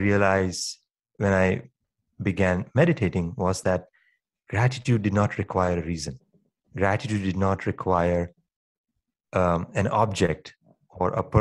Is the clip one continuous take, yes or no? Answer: no